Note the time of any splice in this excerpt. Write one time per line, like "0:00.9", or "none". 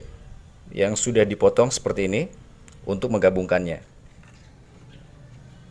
0:04.0

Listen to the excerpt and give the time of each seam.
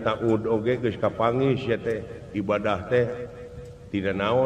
none

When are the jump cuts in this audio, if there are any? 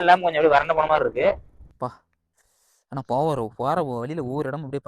0:01.6

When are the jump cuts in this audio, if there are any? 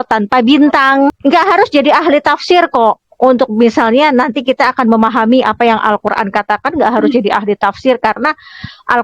0:01.2

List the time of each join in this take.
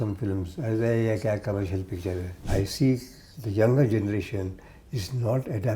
0:02.4

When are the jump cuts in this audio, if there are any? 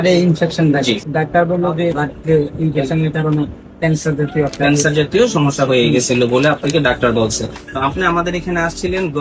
0:01.0
0:02.0
0:07.6

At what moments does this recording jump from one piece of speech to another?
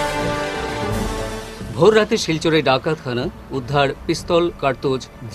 0:01.1

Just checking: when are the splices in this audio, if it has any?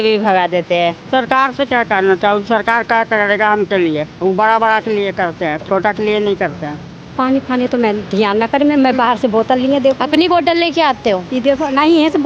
0:01.0
0:07.0

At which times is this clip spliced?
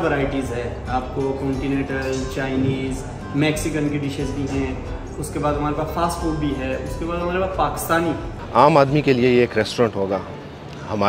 0:08.3

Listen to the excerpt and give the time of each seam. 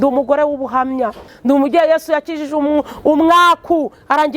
0:01.3

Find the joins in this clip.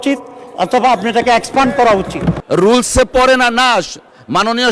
0:02.4

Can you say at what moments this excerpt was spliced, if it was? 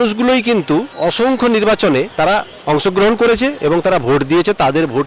0:00.9
0:02.1

